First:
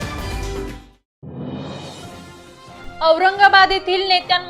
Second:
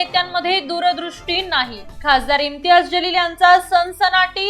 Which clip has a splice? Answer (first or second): first